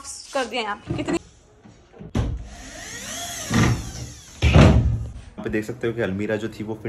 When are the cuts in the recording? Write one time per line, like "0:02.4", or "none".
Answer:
0:01.2
0:05.4